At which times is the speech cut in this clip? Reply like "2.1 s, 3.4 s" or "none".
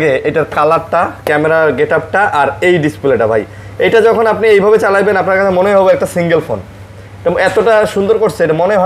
none